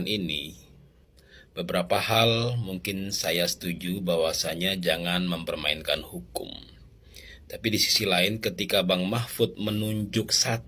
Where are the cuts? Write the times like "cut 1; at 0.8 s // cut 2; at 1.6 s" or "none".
none

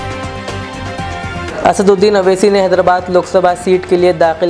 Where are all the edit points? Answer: cut 1; at 1.5 s

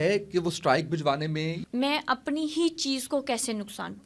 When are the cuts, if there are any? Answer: cut 1; at 1.6 s

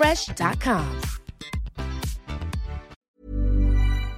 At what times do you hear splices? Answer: cut 1; at 3.0 s

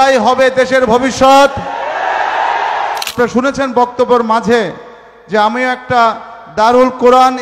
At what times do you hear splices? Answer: cut 1; at 3.1 s

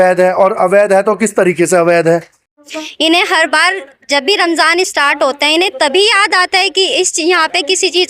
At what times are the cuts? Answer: cut 1; at 2.4 s

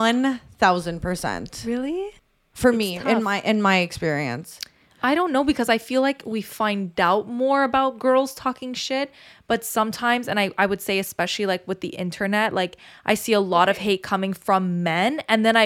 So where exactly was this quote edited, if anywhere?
cut 1; at 2.1 s

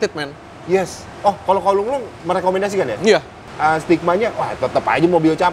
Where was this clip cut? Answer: cut 1; at 3.4 s

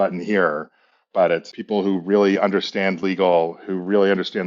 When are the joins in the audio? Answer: cut 1; at 1.5 s

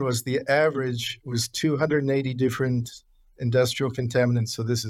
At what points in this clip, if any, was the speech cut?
none

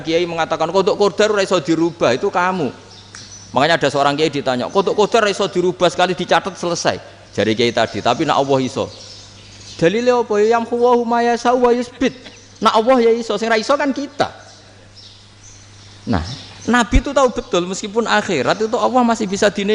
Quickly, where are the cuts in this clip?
none

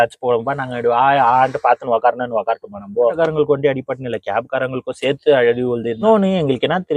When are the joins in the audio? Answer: cut 1; at 3.1 s // cut 2; at 6.0 s

